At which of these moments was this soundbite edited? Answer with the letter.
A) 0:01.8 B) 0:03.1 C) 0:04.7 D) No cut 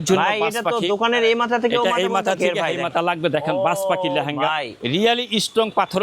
C